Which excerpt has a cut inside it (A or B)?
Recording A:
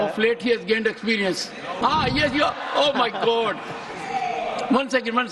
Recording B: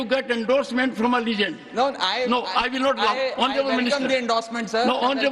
A